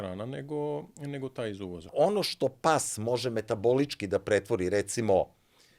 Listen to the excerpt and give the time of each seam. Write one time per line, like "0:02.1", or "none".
0:01.9

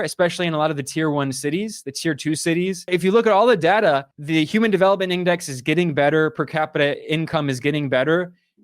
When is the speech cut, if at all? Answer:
0:02.9

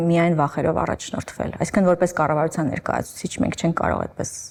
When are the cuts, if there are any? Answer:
none

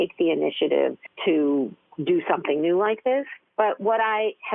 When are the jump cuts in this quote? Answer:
0:01.1
0:01.8
0:03.4

